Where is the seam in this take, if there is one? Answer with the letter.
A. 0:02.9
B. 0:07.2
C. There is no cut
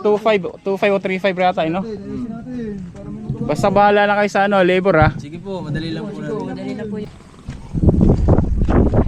B